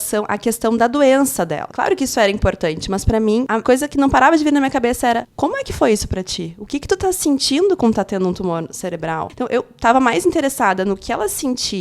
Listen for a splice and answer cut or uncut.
cut